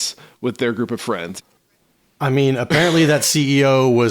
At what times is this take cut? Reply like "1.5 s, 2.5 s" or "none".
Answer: 1.3 s